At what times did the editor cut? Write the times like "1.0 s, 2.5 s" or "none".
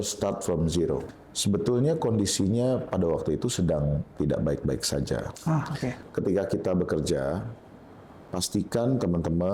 1.0 s, 6.0 s